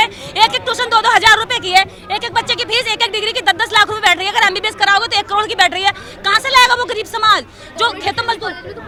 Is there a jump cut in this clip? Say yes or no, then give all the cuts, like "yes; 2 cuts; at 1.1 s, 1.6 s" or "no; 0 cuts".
no; 0 cuts